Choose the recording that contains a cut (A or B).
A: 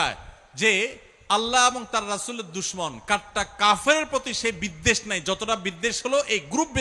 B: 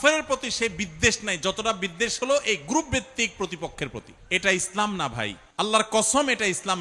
B